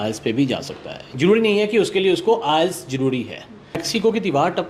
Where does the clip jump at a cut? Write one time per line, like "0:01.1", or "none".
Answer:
0:03.8